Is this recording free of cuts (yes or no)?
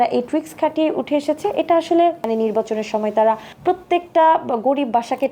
no